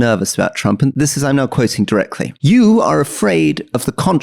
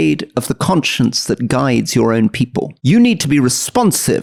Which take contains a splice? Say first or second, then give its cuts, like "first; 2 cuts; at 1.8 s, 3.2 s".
first; 2 cuts; at 0.9 s, 2.3 s